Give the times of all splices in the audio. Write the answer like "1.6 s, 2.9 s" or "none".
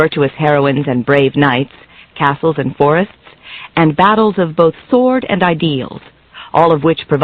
4.4 s